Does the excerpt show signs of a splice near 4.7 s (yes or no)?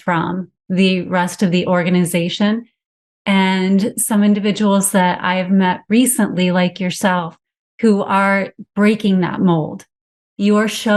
no